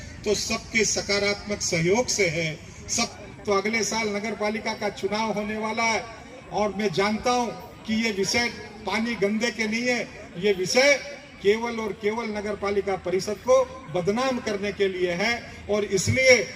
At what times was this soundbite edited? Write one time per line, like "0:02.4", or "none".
0:03.1